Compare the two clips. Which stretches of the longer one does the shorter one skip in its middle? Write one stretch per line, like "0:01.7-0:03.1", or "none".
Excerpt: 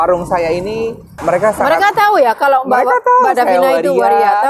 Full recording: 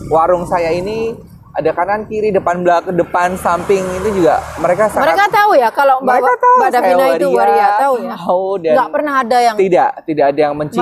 0:01.3-0:04.5